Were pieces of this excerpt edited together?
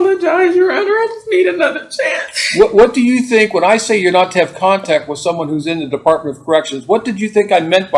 no; 0 cuts

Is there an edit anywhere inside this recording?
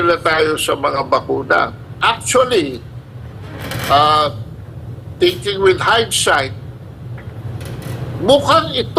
yes; 1 cut; at 1.8 s

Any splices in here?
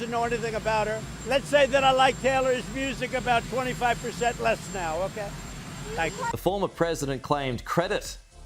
yes; 2 cuts; at 1.1 s, 6.3 s

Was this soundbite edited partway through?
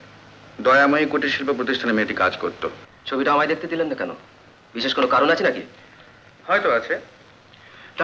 yes; 1 cut; at 2.9 s

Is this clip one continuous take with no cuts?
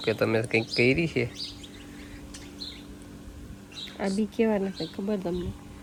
yes; 0 cuts

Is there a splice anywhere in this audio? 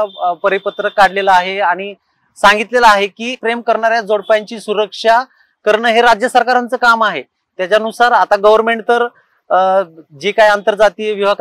no; 0 cuts

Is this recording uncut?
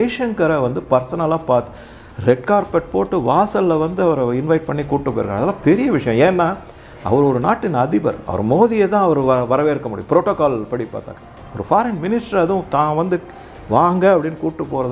yes; 0 cuts

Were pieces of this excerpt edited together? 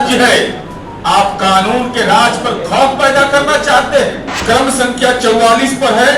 yes; 1 cut; at 4.3 s

